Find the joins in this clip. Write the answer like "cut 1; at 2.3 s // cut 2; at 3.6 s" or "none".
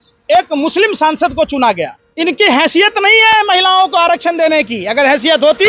cut 1; at 2.0 s